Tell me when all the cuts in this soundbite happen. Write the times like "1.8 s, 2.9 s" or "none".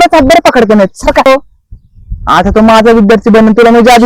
1.3 s